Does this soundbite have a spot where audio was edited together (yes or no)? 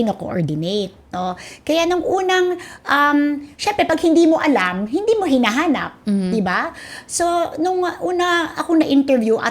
no